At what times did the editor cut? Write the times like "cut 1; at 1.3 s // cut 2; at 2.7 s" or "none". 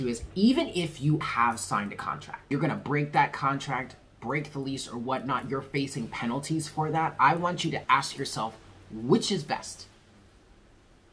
cut 1; at 1.2 s // cut 2; at 2.4 s // cut 3; at 7.8 s